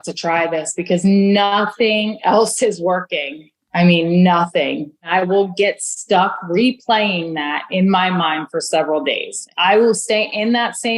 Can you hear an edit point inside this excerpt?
yes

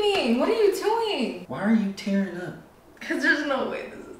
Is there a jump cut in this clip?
yes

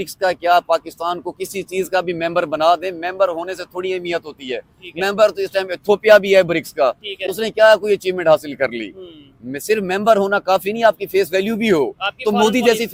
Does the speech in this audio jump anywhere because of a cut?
no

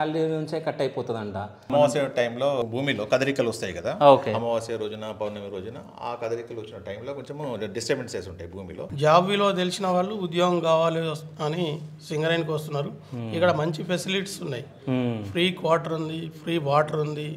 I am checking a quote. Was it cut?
yes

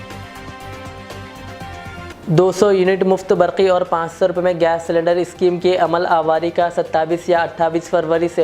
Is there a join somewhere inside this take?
yes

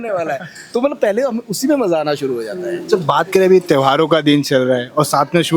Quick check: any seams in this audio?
no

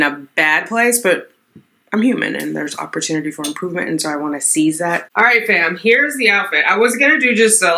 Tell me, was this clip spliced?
yes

